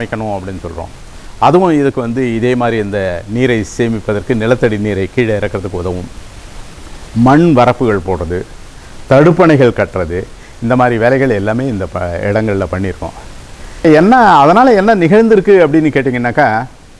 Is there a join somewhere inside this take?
yes; 1 cut; at 13.8 s

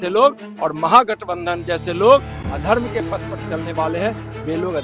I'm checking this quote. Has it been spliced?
no; 0 cuts

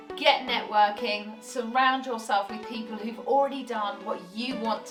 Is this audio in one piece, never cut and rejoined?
yes; 0 cuts

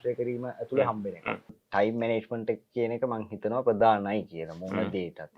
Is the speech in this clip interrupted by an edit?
yes; 1 cut; at 1.6 s

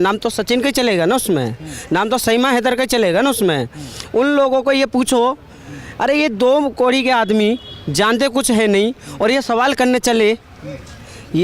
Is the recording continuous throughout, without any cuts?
yes; 0 cuts

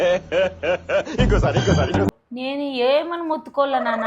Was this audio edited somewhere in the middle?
yes; 1 cut; at 2.2 s

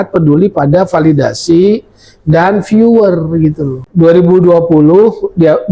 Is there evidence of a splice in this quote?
yes; 1 cut; at 3.7 s

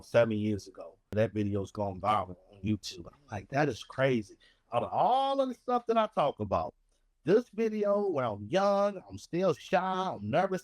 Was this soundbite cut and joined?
yes; 1 cut; at 1.1 s

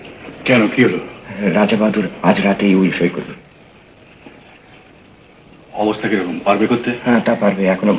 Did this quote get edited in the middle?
no; 0 cuts

